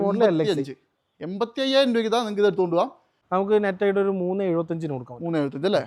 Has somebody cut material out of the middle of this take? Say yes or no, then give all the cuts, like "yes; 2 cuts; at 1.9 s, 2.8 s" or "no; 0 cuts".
yes; 1 cut; at 3.1 s